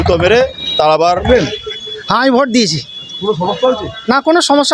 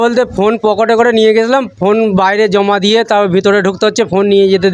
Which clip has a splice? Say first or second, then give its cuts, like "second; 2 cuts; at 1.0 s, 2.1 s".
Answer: first; 1 cut; at 1.2 s